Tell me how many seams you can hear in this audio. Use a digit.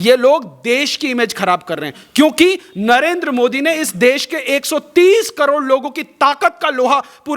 0